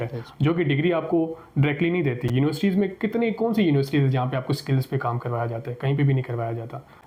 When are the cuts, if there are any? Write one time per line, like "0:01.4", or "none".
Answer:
none

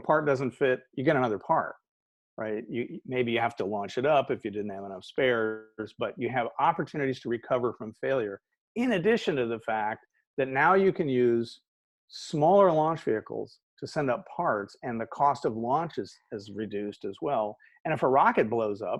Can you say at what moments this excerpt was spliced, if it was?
none

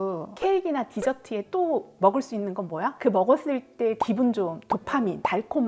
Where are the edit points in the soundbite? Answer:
0:04.0

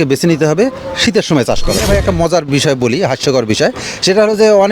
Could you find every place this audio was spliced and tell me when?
0:01.8

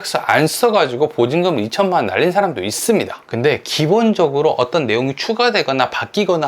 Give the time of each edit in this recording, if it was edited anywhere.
0:03.2

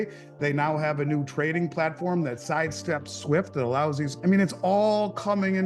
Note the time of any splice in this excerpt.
0:04.1

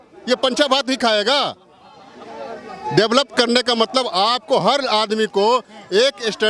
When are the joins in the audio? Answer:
none

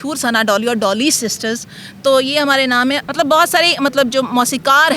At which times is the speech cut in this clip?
none

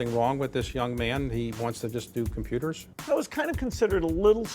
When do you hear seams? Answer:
0:03.0

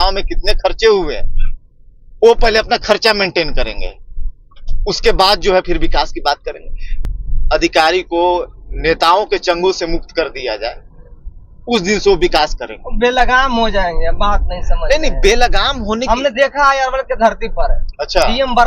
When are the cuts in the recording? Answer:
0:07.0

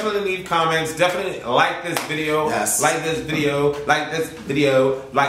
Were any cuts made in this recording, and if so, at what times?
none

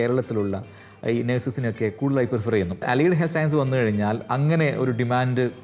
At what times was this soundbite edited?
0:02.8

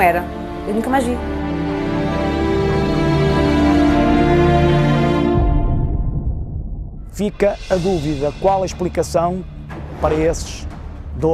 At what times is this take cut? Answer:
0:04.5

